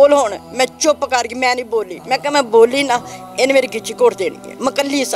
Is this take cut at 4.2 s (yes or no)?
no